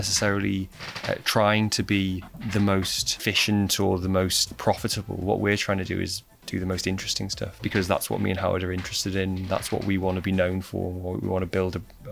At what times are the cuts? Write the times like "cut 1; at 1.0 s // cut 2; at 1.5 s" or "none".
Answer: cut 1; at 2.3 s // cut 2; at 3.0 s // cut 3; at 4.5 s // cut 4; at 7.5 s

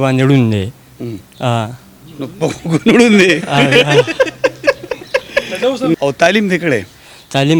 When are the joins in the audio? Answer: cut 1; at 6.0 s

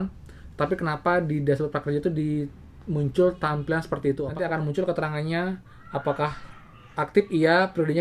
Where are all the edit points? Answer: cut 1; at 4.3 s

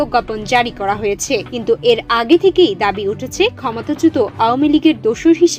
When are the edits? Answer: none

